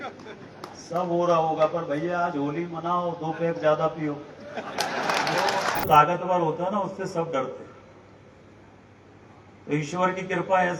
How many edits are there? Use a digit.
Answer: 1